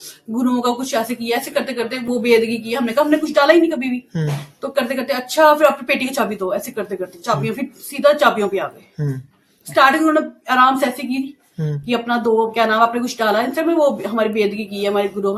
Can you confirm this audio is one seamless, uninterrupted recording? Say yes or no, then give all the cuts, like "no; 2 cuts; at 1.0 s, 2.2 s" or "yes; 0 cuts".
yes; 0 cuts